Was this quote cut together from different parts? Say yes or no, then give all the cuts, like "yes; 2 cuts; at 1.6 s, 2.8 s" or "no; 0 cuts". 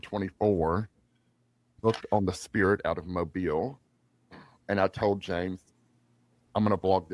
yes; 1 cut; at 1.8 s